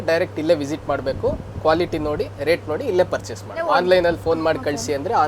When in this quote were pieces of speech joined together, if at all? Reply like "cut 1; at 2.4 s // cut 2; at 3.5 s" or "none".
cut 1; at 3.6 s

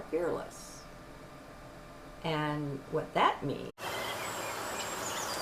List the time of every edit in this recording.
none

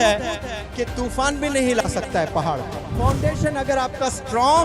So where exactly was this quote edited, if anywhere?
cut 1; at 2.9 s

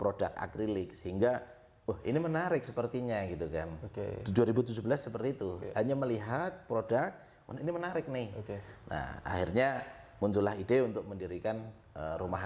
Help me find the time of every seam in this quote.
none

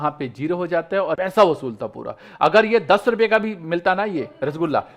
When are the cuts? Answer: cut 1; at 1.2 s

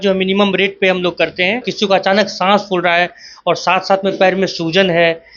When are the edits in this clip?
cut 1; at 1.7 s

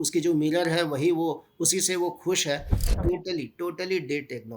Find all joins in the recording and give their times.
cut 1; at 2.8 s

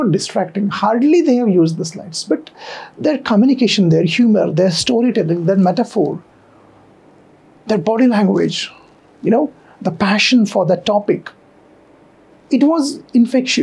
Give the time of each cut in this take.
none

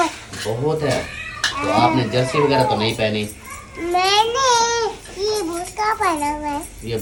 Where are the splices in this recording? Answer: none

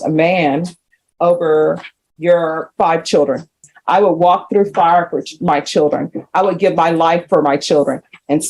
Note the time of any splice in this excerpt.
cut 1; at 3.7 s

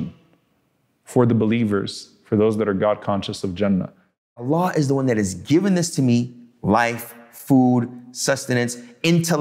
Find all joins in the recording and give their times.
cut 1; at 4.4 s

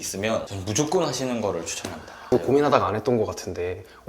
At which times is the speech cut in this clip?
cut 1; at 2.3 s

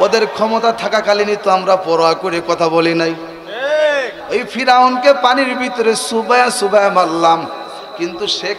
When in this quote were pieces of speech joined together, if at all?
cut 1; at 4.2 s

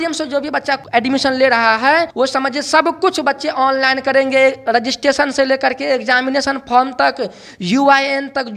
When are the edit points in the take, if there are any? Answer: cut 1; at 0.8 s // cut 2; at 2.1 s

